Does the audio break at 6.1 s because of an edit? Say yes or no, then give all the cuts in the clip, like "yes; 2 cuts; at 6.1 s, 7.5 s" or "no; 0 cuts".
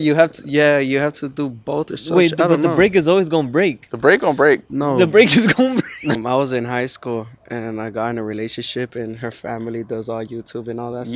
yes; 1 cut; at 6.1 s